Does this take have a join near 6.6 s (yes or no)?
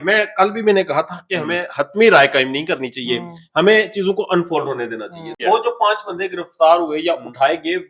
no